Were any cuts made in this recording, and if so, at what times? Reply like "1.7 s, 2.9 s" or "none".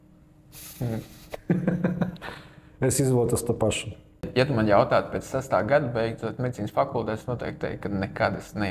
none